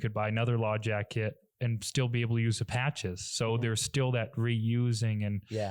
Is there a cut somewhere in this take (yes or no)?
no